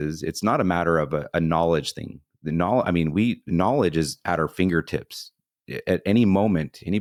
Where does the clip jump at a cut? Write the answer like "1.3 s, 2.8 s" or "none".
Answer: none